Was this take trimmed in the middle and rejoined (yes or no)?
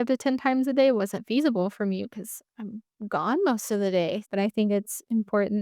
yes